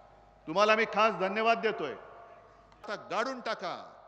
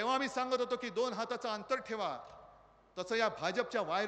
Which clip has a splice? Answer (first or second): first